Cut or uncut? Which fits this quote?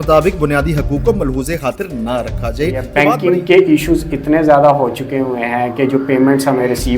cut